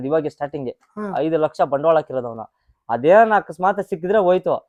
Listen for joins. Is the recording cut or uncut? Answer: uncut